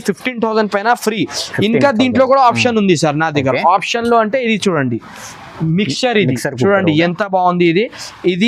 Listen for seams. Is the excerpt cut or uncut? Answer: uncut